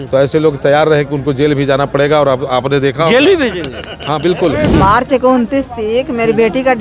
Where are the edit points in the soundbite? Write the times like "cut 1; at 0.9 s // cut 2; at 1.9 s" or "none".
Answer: cut 1; at 4.7 s